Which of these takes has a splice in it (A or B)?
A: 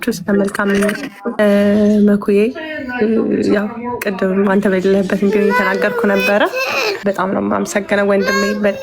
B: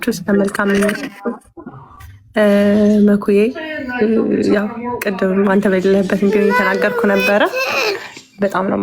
A